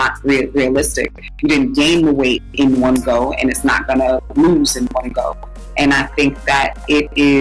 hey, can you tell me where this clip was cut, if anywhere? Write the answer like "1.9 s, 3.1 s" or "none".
none

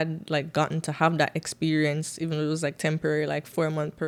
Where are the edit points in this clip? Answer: none

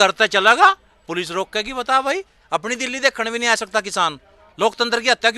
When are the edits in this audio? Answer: none

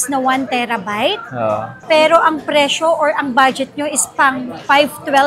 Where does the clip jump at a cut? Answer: none

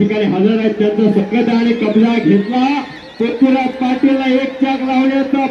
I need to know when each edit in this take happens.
none

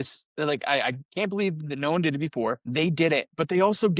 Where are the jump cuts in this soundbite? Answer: 2.6 s

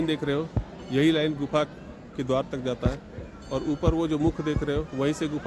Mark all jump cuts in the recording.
none

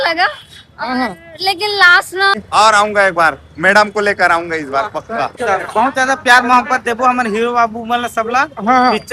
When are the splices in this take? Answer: 2.4 s, 5.4 s

